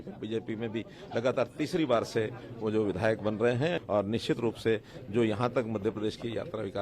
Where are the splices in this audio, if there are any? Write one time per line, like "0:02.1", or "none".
0:03.8